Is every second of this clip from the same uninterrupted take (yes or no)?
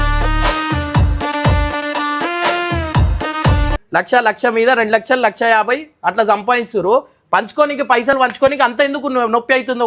no